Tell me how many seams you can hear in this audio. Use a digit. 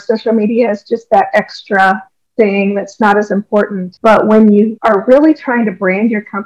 2